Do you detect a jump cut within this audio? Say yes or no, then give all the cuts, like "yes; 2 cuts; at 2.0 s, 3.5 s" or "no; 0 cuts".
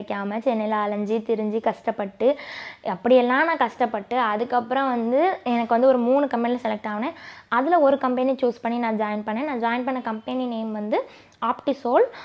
no; 0 cuts